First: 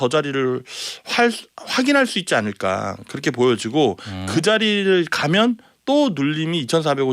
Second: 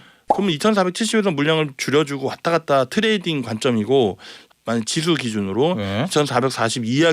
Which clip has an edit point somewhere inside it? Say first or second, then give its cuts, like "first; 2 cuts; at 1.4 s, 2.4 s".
second; 1 cut; at 4.4 s